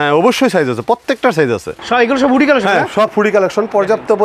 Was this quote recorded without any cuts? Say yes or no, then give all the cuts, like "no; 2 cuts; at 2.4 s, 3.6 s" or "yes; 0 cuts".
no; 1 cut; at 1.7 s